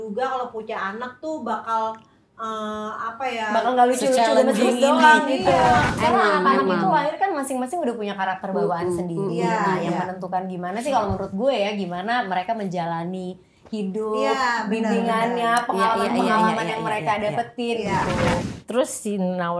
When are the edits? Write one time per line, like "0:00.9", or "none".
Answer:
0:05.9
0:18.5

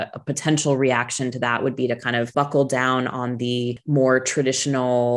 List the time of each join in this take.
0:02.3
0:03.8

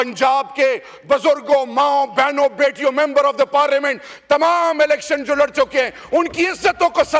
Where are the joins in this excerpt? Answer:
none

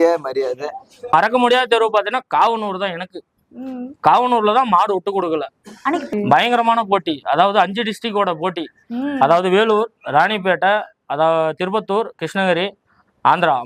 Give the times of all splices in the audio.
0:01.1
0:06.1

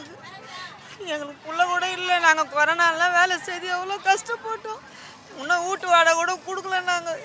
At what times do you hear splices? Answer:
none

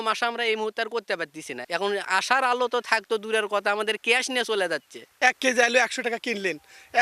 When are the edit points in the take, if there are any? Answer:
0:01.5
0:05.0

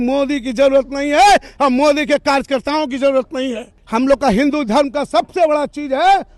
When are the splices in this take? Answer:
0:03.7

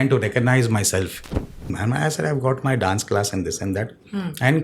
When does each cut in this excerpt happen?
0:01.7

